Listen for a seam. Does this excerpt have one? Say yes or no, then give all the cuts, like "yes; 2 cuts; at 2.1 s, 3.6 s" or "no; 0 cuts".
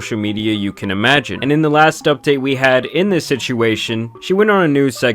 yes; 1 cut; at 1.3 s